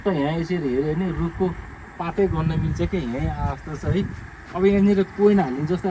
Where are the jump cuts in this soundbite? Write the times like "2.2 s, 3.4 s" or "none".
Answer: none